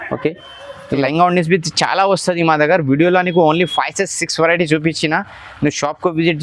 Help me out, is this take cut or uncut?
cut